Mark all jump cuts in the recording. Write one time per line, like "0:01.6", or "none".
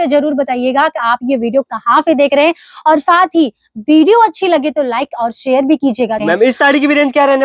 0:06.5